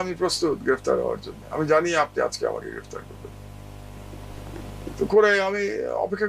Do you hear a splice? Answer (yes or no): no